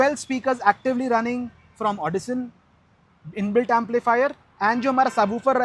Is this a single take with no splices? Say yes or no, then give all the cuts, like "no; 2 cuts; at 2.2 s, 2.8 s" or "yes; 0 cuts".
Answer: yes; 0 cuts